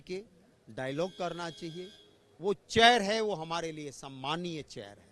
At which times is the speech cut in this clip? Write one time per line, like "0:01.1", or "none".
none